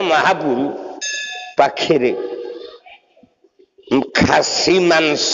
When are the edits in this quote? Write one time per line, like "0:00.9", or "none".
none